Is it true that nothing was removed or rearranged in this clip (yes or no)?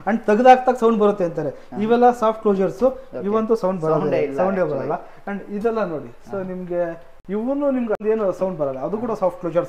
no